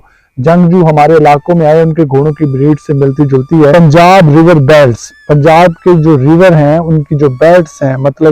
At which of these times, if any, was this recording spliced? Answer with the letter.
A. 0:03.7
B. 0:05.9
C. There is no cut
A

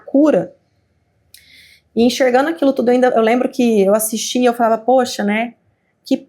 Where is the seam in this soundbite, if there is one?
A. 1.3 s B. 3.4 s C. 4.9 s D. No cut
D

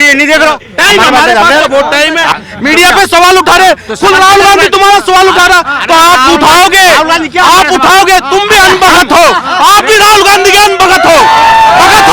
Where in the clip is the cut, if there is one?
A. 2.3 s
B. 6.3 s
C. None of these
A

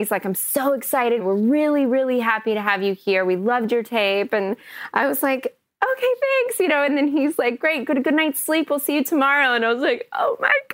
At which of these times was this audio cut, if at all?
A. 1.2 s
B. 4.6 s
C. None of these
A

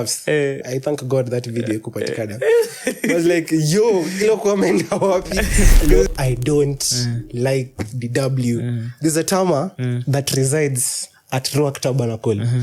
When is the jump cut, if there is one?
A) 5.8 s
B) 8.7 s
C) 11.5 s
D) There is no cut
A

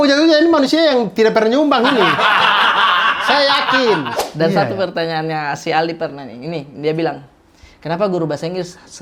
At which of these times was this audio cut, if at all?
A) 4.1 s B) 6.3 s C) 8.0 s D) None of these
A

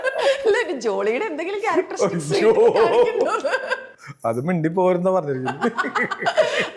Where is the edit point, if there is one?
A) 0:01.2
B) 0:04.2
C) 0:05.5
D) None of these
D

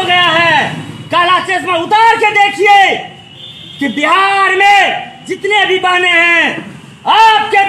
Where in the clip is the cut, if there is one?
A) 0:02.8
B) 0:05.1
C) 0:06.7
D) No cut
D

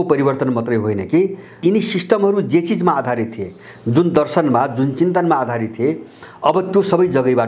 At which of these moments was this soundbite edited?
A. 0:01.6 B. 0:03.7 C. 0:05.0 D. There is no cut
A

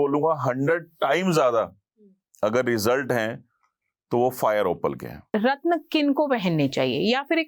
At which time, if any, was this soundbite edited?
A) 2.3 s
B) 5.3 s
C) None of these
B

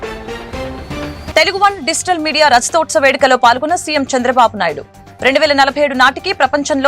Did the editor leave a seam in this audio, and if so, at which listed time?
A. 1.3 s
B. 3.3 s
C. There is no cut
A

